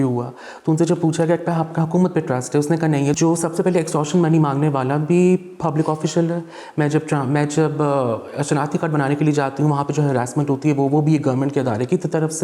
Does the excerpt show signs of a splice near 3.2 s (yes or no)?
yes